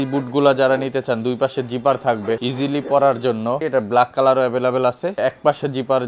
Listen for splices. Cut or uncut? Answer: cut